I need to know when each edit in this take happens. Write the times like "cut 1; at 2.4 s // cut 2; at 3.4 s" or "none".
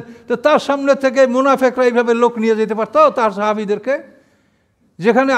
none